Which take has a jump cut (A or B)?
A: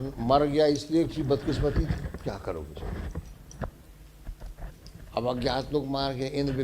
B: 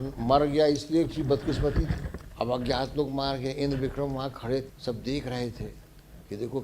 B